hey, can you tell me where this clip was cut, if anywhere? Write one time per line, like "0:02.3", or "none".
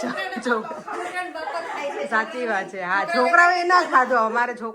none